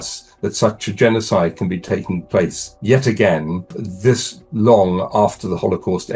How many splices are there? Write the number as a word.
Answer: two